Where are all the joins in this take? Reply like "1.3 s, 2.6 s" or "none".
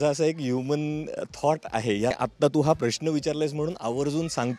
2.2 s